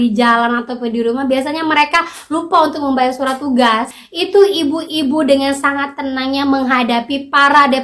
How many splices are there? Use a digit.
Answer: 1